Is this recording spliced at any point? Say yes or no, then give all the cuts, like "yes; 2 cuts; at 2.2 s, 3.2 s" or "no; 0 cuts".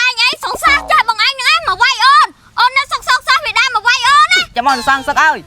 yes; 1 cut; at 4.5 s